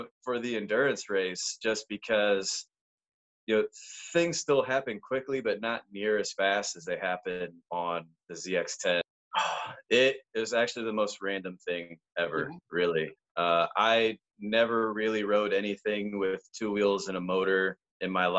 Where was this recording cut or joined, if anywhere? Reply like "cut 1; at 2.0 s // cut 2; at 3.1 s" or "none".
cut 1; at 9.1 s